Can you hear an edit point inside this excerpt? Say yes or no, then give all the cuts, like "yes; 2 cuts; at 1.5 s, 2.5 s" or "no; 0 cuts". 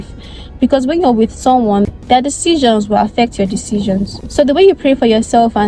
yes; 2 cuts; at 1.9 s, 4.2 s